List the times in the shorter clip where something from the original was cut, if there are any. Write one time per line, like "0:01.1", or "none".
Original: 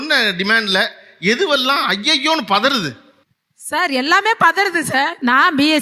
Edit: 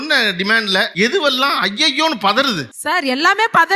0:00.9
0:02.7